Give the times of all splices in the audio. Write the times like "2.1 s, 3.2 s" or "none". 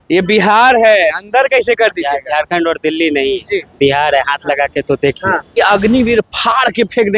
5.5 s